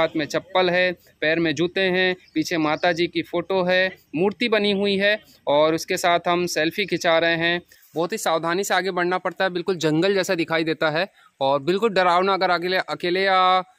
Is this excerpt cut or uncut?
cut